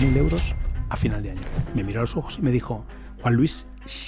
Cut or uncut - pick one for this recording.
cut